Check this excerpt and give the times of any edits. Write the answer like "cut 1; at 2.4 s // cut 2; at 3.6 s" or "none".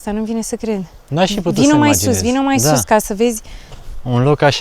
none